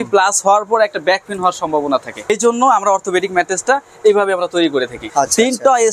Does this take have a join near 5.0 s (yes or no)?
yes